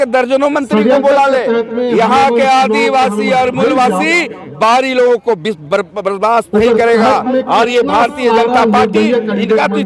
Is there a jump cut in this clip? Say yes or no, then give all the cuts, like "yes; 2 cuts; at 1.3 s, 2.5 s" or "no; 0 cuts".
no; 0 cuts